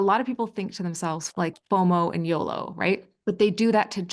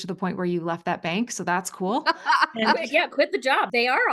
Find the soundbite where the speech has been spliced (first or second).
first